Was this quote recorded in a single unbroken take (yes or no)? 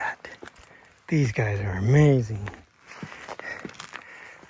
yes